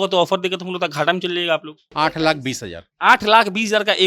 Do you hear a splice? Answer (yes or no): yes